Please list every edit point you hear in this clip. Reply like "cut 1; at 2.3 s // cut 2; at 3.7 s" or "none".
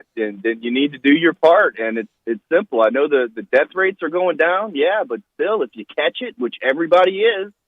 cut 1; at 6.7 s